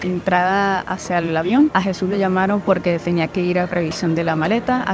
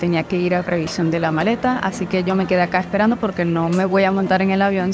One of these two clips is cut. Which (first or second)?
first